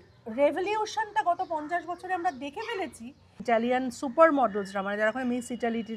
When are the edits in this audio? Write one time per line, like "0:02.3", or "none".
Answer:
0:03.4